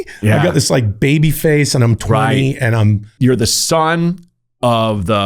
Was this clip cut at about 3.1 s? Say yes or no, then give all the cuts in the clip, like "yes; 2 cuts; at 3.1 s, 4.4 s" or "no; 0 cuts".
yes; 1 cut; at 3.1 s